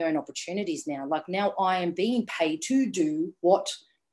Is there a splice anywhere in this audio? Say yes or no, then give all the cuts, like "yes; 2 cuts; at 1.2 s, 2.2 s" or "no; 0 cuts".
no; 0 cuts